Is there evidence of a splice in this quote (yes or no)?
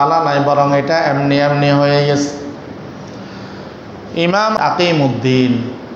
yes